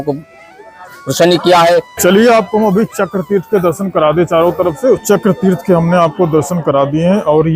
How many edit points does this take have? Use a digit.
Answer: 2